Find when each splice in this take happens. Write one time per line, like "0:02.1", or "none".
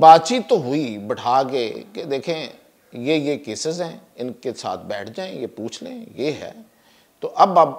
none